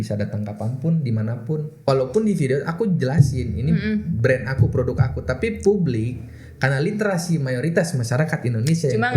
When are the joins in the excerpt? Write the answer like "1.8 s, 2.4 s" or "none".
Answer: 1.8 s